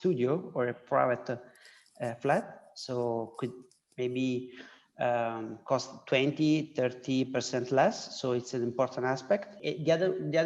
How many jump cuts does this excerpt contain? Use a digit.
1